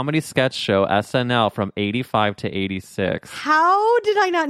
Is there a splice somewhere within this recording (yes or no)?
no